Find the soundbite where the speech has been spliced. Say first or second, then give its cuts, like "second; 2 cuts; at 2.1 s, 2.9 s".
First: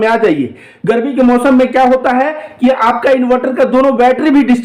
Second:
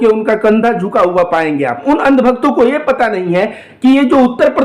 second; 1 cut; at 1.8 s